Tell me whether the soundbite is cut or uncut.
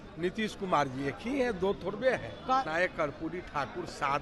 cut